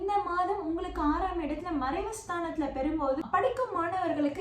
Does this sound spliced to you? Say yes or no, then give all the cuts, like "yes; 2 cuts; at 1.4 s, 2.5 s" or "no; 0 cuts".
yes; 1 cut; at 3.2 s